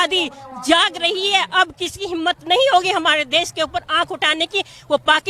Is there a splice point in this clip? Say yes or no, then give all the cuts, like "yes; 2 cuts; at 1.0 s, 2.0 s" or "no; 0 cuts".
no; 0 cuts